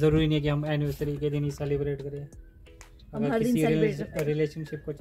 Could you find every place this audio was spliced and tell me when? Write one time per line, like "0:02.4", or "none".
none